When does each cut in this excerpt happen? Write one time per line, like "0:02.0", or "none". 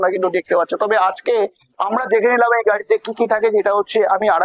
none

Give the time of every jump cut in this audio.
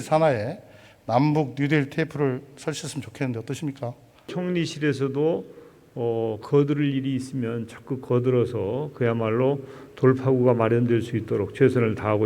0:04.3

